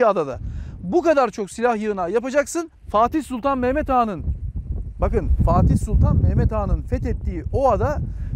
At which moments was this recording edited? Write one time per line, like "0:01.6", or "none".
0:02.8